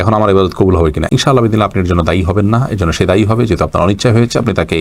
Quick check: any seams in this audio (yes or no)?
no